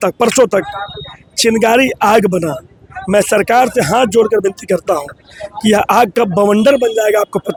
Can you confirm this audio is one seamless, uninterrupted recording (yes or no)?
yes